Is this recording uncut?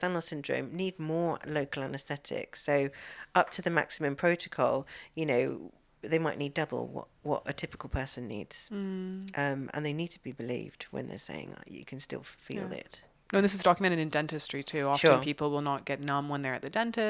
yes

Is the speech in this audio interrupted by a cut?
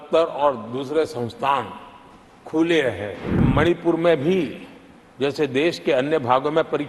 yes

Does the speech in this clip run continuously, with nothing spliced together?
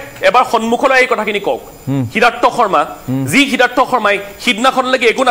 yes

